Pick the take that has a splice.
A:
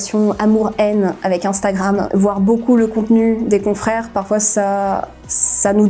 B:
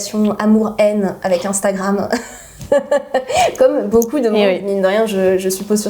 A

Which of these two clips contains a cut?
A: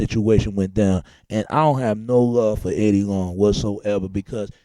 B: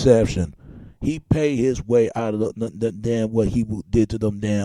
A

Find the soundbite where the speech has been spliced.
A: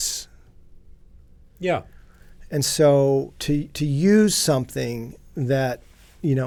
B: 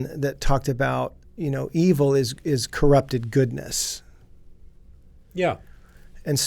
B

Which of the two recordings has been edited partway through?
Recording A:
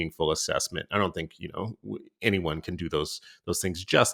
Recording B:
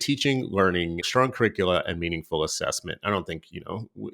B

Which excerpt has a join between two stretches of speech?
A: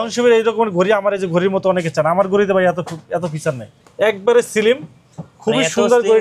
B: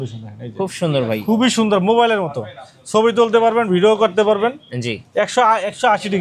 A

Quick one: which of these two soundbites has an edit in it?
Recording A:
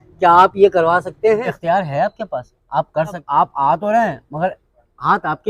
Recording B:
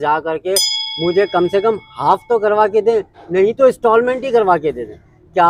A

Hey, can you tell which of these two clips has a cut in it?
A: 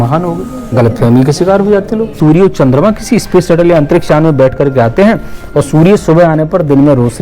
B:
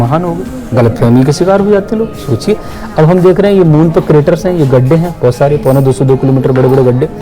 A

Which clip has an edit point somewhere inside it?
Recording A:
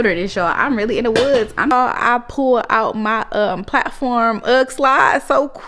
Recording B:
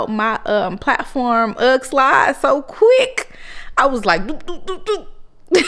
A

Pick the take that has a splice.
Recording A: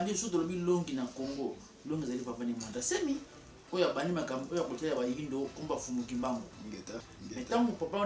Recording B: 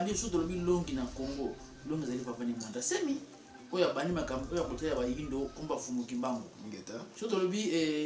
A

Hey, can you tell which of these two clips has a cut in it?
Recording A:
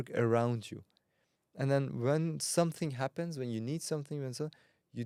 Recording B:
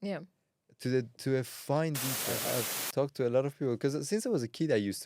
B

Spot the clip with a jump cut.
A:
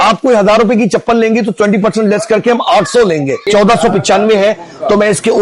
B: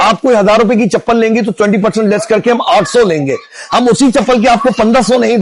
A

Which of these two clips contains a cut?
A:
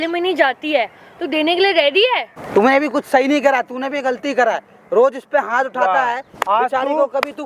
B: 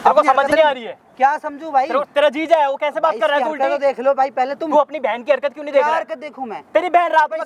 A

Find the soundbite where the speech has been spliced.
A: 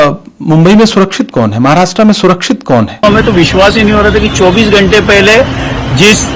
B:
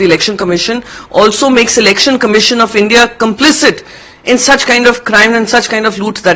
A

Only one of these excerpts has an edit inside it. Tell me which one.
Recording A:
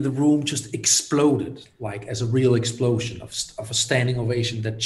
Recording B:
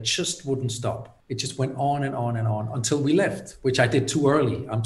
B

